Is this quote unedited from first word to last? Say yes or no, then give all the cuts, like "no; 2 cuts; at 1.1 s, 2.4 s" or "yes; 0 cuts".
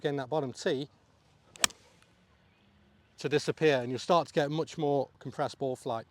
no; 1 cut; at 5.2 s